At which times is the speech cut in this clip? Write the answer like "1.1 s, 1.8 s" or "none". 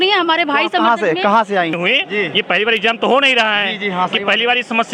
1.7 s